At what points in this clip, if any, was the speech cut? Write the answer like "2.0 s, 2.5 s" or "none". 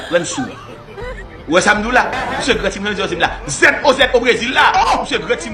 none